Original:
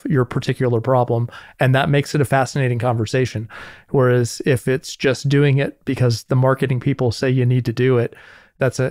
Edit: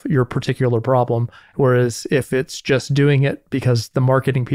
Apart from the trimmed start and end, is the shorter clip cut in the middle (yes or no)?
yes